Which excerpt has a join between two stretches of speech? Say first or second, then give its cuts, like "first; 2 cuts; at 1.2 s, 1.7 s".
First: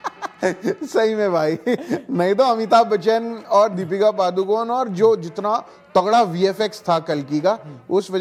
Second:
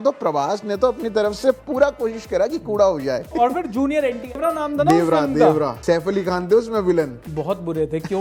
second; 4 cuts; at 3.3 s, 4.4 s, 5.8 s, 7.2 s